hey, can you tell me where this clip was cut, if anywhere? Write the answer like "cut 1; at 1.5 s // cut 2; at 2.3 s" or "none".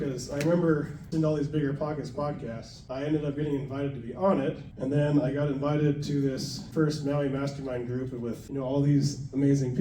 cut 1; at 1.1 s // cut 2; at 6.6 s